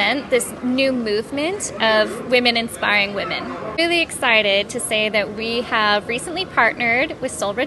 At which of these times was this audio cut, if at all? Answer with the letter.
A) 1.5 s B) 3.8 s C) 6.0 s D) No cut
B